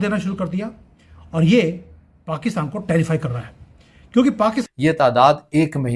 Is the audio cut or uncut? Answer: cut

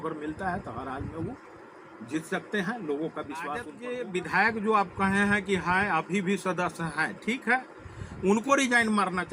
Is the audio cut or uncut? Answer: cut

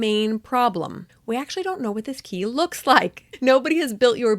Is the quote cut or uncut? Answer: cut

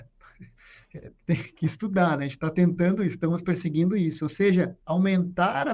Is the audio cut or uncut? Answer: cut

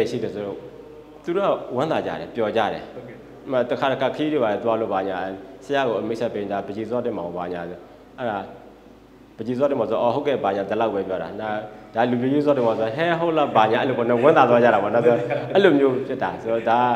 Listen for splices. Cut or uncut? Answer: uncut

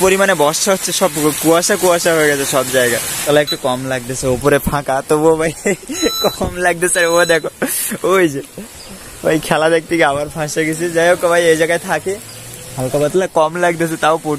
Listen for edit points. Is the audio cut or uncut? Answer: cut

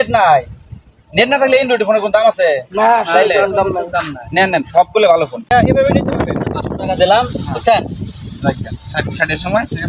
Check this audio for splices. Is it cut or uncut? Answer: cut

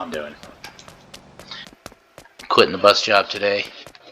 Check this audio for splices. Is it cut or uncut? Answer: cut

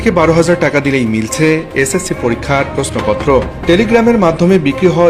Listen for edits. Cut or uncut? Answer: uncut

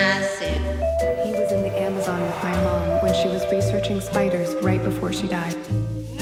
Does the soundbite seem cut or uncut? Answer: uncut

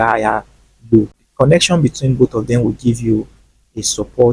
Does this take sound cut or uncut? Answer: cut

